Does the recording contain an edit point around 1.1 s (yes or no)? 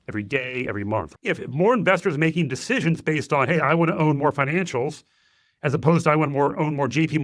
yes